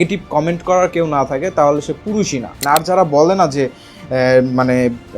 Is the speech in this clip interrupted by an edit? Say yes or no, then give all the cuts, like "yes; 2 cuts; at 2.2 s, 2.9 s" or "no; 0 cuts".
yes; 1 cut; at 2.6 s